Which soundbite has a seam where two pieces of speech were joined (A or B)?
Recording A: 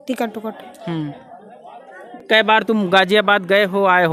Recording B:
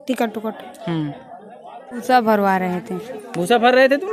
B